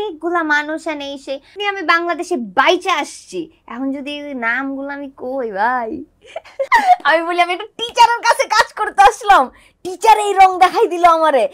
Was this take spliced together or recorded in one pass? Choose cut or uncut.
cut